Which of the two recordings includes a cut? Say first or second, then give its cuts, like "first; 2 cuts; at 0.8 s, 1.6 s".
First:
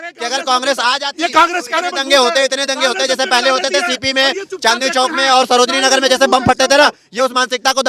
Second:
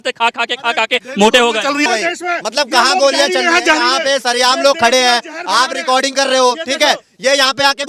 second; 1 cut; at 1.8 s